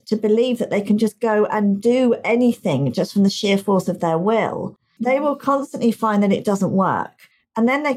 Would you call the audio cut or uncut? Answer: cut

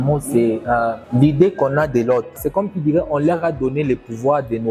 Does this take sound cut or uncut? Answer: cut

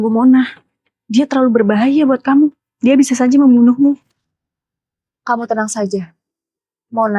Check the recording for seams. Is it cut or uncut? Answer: cut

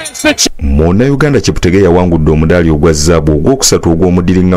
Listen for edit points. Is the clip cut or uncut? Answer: uncut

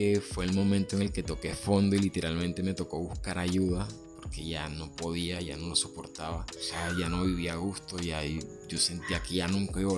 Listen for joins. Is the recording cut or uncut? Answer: uncut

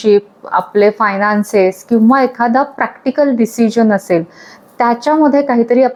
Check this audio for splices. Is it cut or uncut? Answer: uncut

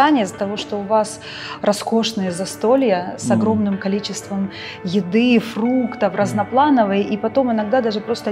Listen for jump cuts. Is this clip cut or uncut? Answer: uncut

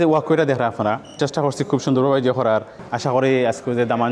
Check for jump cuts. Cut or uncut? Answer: cut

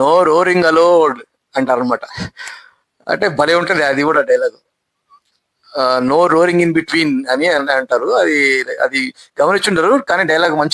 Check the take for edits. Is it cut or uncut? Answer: uncut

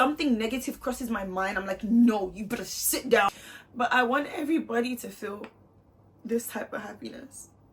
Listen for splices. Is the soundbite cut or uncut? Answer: cut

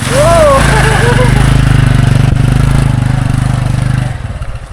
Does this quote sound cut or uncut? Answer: uncut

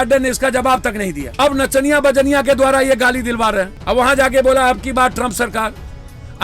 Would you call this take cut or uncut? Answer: cut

